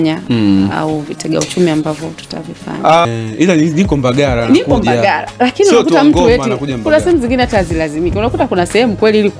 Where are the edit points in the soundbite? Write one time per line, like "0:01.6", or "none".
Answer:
0:03.1